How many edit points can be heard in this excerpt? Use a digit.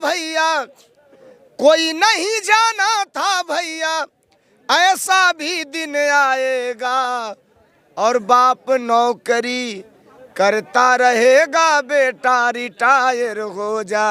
0